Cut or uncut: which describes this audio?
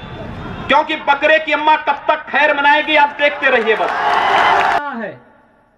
cut